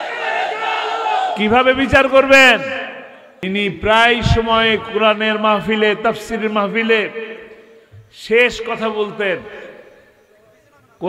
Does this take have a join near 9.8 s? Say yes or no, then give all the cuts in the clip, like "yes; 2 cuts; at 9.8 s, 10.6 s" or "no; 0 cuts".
no; 1 cut; at 3.5 s